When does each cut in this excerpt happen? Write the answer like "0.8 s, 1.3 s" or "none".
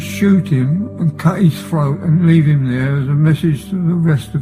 none